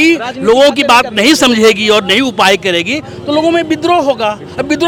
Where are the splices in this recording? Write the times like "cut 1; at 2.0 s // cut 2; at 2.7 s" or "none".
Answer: none